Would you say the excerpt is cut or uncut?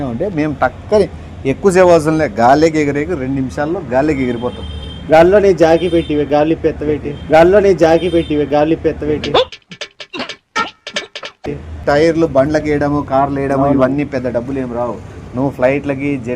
cut